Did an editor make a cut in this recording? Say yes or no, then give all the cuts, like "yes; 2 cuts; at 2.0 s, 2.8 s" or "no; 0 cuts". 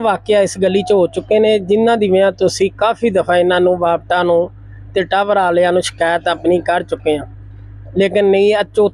no; 0 cuts